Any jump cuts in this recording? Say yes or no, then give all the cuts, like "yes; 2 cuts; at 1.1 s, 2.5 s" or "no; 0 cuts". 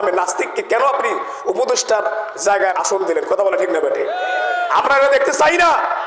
yes; 1 cut; at 2.7 s